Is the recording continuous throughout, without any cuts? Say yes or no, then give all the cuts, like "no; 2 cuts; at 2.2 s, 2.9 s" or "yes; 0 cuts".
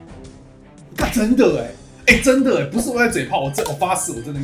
no; 1 cut; at 0.9 s